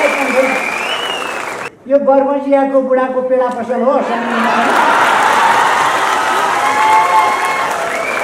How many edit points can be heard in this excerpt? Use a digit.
1